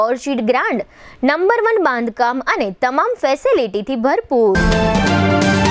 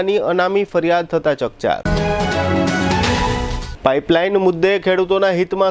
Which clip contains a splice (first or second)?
first